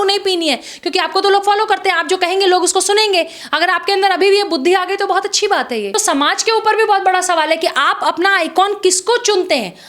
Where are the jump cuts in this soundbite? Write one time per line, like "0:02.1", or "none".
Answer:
0:05.9